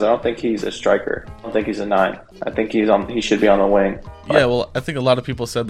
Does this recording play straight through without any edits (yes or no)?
yes